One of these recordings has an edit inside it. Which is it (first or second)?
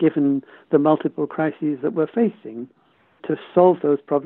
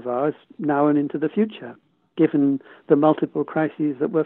first